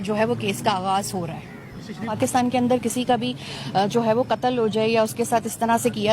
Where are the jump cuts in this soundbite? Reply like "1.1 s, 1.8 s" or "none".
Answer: 2.2 s